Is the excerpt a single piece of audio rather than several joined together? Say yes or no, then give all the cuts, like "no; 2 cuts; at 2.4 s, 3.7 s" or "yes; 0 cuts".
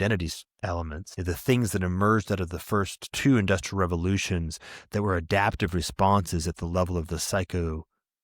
no; 2 cuts; at 1.0 s, 3.0 s